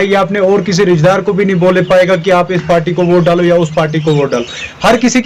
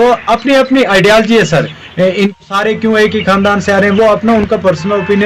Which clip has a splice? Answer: second; 1 cut; at 2.4 s

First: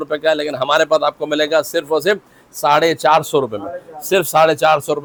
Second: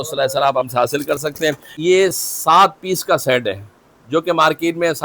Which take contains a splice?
second; 1 cut; at 1.7 s

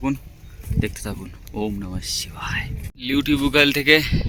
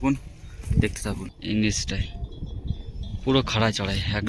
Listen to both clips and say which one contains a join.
second; 1 cut; at 1.3 s

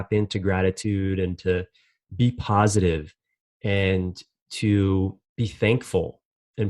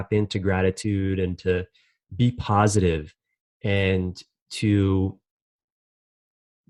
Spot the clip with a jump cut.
first; 1 cut; at 5.2 s

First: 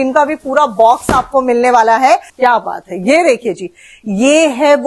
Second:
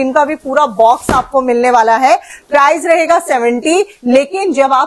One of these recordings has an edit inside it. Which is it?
first; 1 cut; at 2.3 s

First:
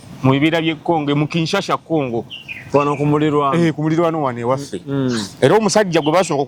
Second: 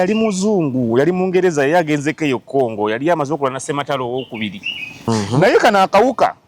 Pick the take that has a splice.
second; 1 cut; at 5.0 s

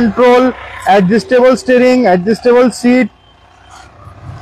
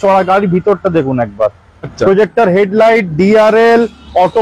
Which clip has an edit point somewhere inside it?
second; 1 cut; at 1.9 s

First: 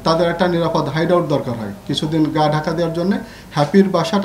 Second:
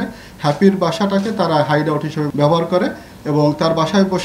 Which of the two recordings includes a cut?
second; 1 cut; at 2.3 s

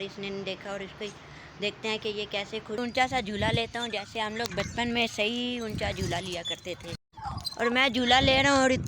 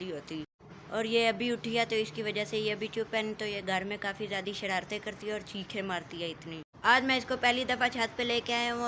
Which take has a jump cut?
first; 1 cut; at 2.8 s

